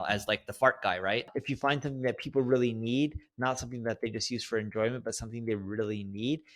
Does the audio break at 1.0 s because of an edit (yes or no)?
yes